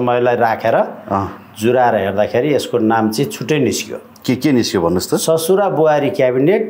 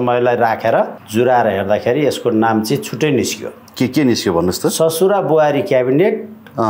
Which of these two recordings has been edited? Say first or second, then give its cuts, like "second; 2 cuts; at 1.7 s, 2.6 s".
second; 1 cut; at 1.0 s